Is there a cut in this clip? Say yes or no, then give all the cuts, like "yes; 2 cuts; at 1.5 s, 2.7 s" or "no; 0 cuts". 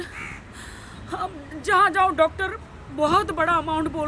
no; 0 cuts